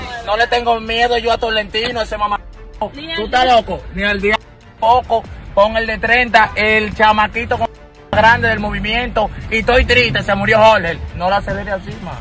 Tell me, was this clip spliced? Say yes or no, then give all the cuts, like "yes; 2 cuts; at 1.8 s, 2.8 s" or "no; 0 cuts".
no; 0 cuts